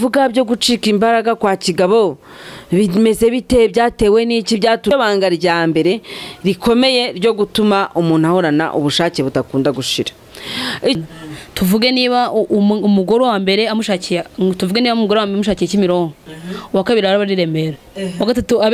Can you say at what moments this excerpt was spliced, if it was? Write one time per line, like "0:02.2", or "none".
0:04.9
0:11.0